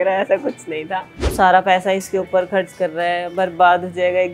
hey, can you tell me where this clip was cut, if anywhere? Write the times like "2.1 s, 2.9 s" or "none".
1.2 s